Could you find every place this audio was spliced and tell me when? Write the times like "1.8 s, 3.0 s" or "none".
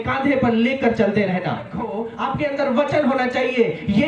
2.0 s

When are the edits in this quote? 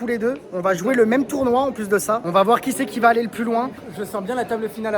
3.8 s

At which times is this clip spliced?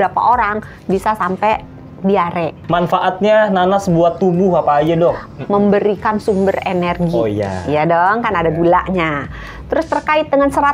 2.6 s, 5.3 s

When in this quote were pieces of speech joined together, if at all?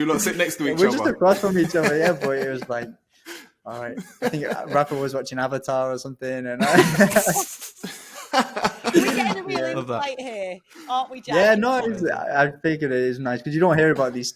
none

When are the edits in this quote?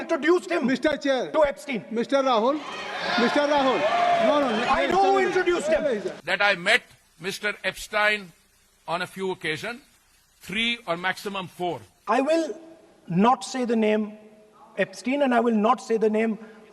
6.2 s, 11.9 s

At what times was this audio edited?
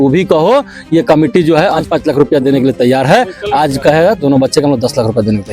1.8 s

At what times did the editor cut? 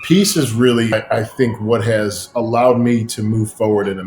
0.9 s

